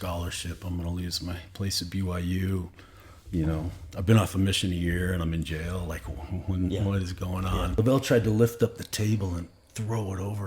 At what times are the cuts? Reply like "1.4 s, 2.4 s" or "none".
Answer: 7.7 s